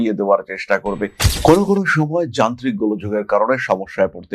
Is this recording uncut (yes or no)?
no